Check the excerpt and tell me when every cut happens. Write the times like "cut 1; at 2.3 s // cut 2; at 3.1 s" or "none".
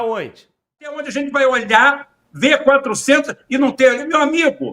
cut 1; at 1.1 s